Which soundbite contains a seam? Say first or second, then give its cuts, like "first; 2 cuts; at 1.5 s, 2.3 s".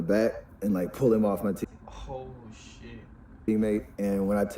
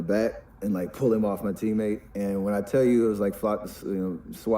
second; 1 cut; at 1.6 s